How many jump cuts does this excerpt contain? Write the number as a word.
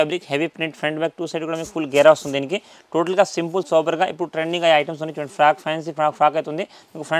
zero